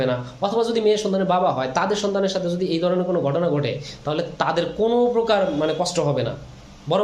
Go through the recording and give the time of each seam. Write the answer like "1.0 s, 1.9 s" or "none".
none